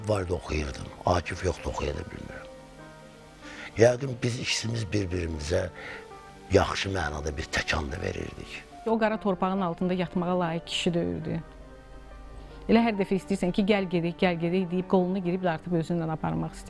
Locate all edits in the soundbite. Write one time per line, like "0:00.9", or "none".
0:08.7